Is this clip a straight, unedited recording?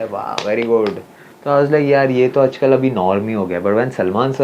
yes; 0 cuts

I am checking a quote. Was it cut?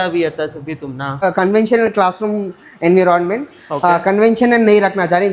yes; 1 cut; at 1.2 s

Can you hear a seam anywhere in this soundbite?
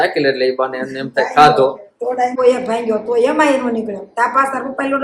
yes; 1 cut; at 2.4 s

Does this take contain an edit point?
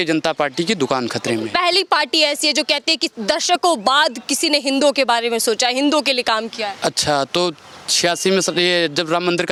no; 0 cuts

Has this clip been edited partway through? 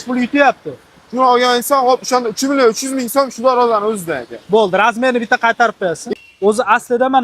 yes; 1 cut; at 6.0 s

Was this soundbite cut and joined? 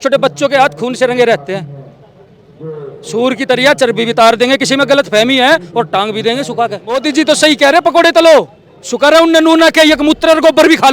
yes; 1 cut; at 7.0 s

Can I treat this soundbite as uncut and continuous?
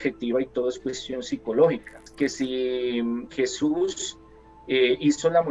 no; 1 cut; at 2.0 s

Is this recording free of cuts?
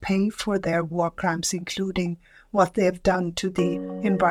yes; 0 cuts

